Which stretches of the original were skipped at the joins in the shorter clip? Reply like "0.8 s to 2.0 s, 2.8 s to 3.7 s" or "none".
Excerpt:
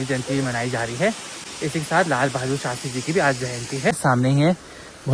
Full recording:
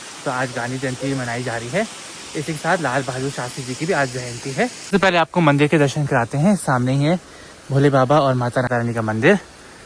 4.7 s to 6.6 s